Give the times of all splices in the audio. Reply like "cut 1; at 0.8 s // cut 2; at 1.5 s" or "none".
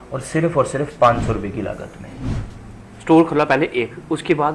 cut 1; at 2.4 s